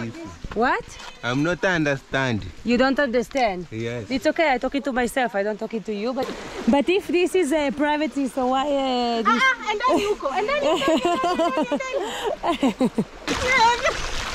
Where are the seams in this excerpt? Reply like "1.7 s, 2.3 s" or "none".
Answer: 6.3 s, 13.2 s